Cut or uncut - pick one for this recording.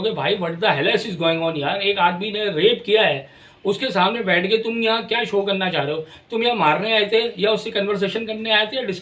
uncut